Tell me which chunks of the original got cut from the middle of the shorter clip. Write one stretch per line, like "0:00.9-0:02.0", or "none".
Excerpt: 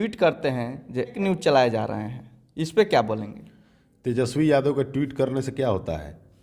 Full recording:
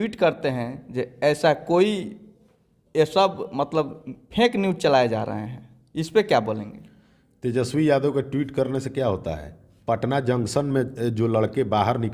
0:01.2-0:04.5